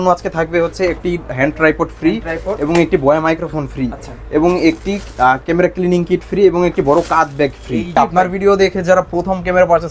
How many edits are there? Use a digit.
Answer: 1